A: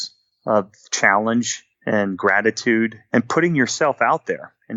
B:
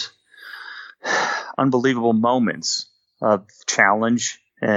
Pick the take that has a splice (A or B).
A